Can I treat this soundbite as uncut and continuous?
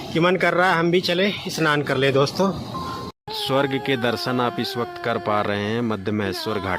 no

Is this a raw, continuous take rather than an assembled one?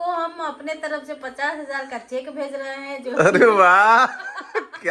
yes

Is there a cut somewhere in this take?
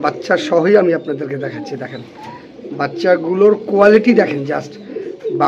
no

